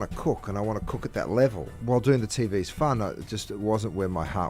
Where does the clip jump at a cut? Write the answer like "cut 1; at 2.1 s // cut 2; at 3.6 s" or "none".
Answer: cut 1; at 1.7 s